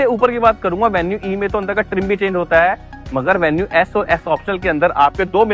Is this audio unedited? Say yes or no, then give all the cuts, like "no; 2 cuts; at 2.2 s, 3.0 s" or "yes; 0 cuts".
yes; 0 cuts